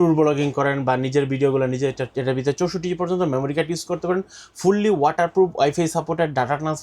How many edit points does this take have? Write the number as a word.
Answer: zero